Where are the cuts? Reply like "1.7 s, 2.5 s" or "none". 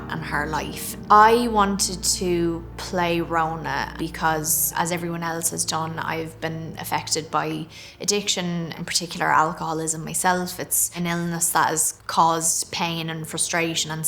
0.9 s